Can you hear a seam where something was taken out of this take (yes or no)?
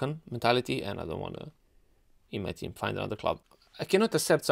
yes